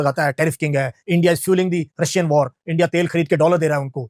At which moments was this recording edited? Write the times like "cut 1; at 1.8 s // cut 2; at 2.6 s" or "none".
none